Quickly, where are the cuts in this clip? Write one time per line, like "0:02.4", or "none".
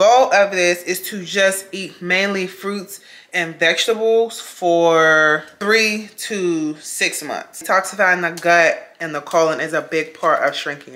0:05.5
0:07.6